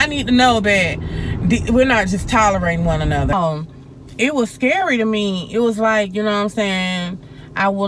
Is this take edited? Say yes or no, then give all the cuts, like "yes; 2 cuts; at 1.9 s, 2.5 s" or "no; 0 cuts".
yes; 1 cut; at 3.3 s